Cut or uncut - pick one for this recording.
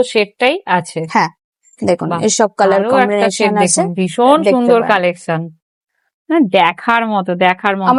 uncut